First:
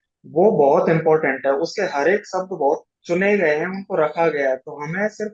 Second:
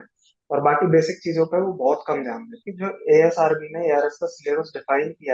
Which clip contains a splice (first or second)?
second